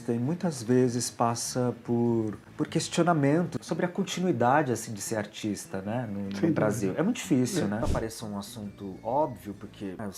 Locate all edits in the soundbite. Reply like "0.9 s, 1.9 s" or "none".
3.6 s, 7.8 s